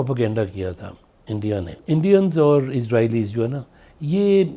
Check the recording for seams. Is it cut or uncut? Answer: cut